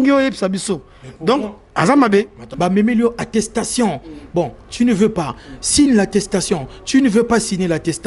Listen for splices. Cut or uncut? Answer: cut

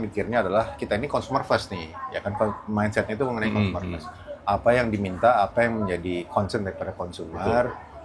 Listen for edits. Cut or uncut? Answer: uncut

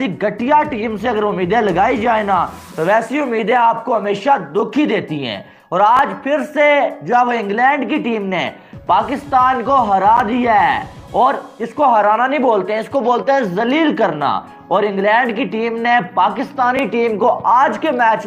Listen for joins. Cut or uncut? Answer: uncut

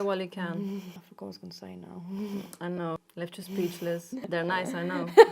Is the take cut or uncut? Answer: cut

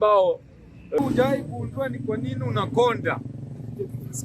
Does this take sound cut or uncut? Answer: cut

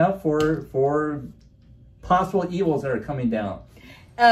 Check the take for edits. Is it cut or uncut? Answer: uncut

